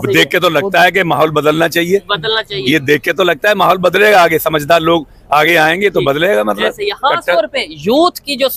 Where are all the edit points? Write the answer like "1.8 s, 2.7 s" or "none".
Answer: none